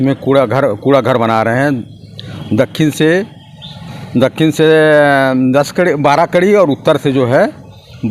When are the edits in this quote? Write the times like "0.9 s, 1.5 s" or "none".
none